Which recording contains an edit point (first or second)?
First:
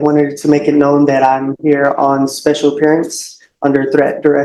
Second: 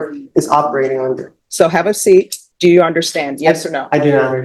second